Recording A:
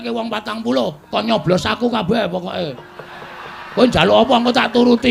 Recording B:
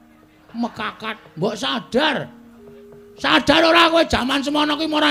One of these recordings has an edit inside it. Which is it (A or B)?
A